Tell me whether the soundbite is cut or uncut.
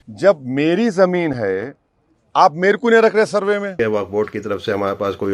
cut